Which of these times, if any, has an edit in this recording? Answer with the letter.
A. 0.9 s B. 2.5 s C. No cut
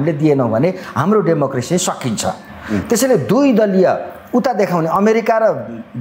C